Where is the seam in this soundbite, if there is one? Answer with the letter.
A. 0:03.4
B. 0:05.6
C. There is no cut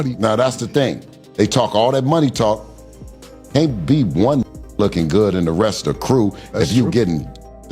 C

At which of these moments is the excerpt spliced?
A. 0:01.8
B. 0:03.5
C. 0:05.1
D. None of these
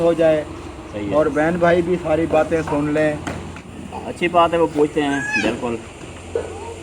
B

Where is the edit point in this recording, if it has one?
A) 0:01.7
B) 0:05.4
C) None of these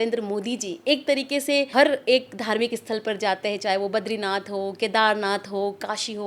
A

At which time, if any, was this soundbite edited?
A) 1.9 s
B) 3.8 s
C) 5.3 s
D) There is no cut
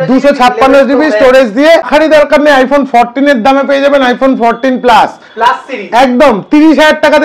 A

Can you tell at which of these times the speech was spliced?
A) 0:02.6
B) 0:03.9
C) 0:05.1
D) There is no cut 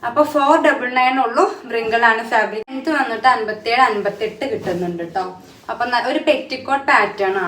A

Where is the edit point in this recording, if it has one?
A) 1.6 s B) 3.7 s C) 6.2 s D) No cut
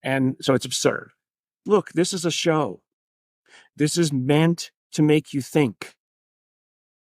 A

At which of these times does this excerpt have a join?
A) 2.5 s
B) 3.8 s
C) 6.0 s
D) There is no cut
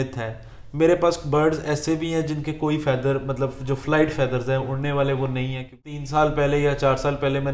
C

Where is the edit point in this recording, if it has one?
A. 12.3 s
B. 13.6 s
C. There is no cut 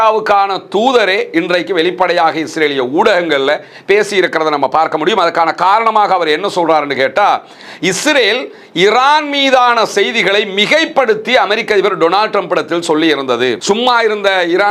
B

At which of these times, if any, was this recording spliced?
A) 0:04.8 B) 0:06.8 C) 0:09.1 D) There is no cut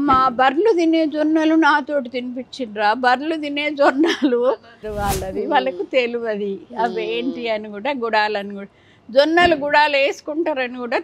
A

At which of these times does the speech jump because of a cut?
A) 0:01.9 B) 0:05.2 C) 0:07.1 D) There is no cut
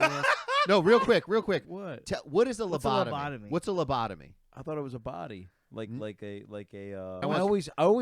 C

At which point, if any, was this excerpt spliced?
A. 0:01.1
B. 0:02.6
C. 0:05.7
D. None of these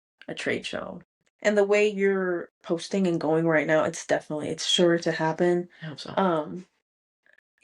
A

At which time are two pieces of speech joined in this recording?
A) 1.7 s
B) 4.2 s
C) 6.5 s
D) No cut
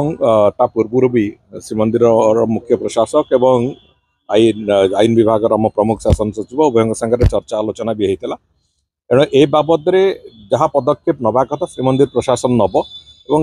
D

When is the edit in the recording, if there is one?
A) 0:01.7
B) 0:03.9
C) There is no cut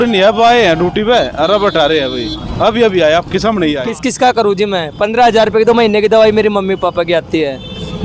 B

